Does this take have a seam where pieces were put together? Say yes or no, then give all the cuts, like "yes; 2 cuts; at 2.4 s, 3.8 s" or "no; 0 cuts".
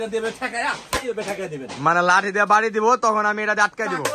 no; 0 cuts